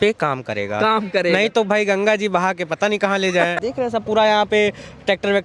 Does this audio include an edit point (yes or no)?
yes